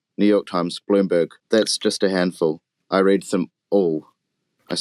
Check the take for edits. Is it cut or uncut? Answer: cut